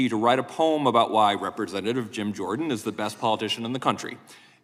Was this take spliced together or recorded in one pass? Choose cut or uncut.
uncut